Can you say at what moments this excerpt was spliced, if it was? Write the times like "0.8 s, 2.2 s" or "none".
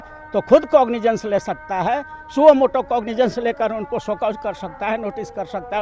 none